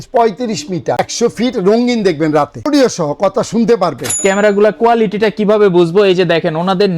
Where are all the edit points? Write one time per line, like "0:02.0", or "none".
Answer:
0:01.0
0:02.6
0:04.2